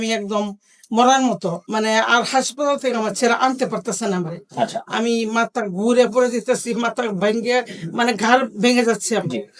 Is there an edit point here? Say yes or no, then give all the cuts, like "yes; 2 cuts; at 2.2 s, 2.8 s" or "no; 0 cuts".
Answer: yes; 1 cut; at 1.6 s